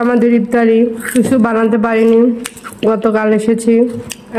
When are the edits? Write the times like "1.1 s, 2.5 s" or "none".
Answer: 1.0 s